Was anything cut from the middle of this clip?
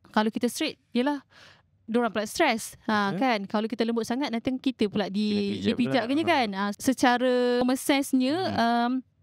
yes; 2 cuts; at 6.7 s, 7.6 s

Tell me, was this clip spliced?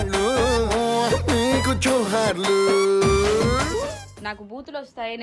yes; 1 cut; at 4.1 s

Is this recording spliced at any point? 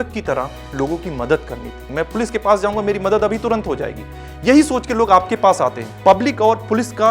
yes; 2 cuts; at 1.8 s, 5.9 s

